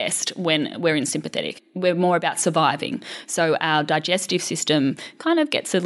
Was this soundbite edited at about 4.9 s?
no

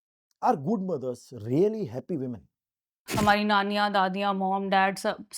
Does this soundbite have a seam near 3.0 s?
yes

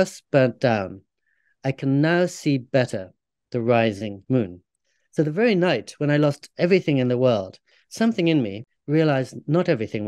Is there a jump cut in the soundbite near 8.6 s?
yes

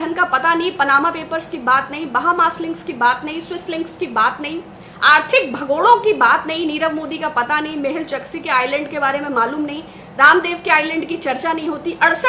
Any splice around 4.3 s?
no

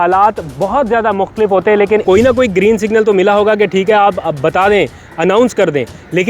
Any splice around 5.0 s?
no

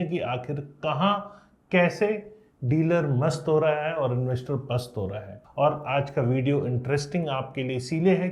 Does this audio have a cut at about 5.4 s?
yes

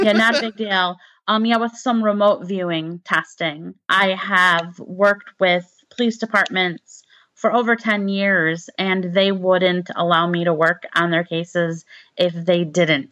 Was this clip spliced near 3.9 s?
yes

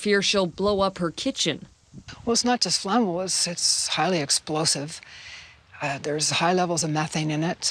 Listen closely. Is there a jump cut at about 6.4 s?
yes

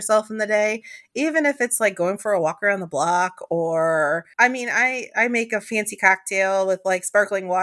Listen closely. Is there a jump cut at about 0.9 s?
no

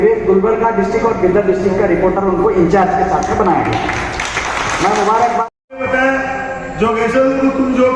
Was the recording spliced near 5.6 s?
yes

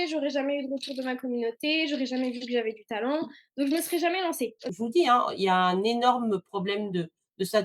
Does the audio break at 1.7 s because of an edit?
no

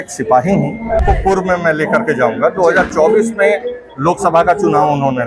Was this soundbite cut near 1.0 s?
yes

